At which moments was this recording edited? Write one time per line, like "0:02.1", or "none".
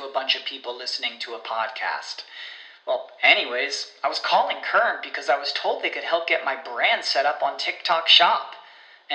none